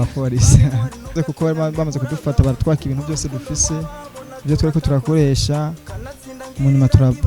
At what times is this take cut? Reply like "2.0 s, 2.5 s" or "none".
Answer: 1.1 s